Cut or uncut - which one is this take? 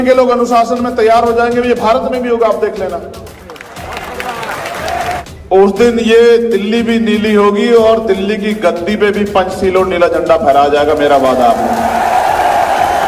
cut